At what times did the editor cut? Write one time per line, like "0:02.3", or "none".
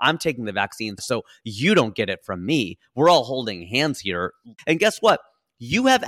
0:00.9
0:04.6